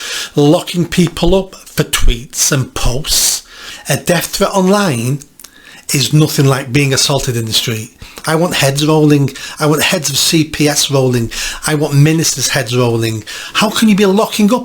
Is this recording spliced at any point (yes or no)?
yes